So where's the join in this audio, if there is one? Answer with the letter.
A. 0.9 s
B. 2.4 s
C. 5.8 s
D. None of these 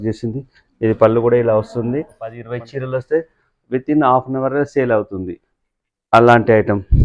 B